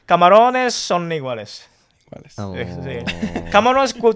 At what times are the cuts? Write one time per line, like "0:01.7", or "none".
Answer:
none